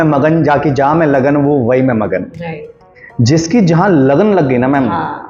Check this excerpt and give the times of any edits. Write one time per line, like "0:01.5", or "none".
none